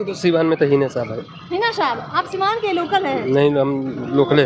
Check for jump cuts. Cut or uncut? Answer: uncut